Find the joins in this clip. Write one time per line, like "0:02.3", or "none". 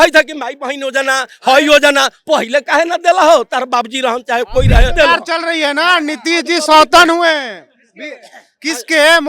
0:05.0